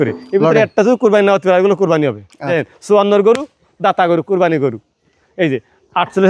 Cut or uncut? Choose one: cut